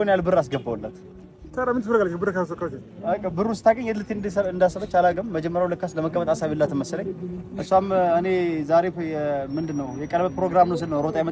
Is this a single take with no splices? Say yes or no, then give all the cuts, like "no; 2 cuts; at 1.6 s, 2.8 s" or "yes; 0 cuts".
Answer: yes; 0 cuts